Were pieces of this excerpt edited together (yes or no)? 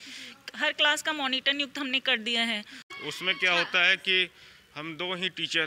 yes